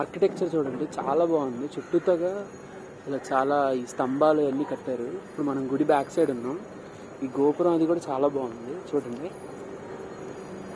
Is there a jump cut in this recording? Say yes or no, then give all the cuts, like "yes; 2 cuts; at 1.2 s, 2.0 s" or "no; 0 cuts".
no; 0 cuts